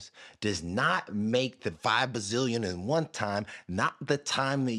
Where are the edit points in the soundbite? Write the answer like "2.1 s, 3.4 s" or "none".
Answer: 1.8 s